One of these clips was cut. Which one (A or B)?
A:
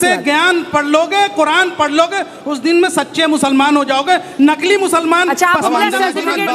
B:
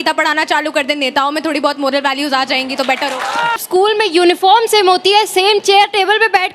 B